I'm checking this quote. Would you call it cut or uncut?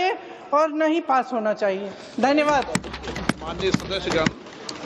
cut